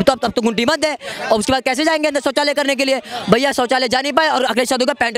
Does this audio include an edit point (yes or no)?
no